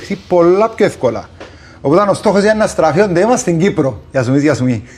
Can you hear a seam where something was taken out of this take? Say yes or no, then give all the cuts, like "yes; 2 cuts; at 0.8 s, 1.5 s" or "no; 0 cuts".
no; 0 cuts